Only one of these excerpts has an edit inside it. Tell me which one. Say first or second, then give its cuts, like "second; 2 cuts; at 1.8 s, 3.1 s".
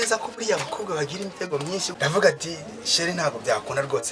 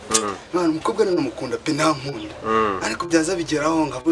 first; 1 cut; at 1.9 s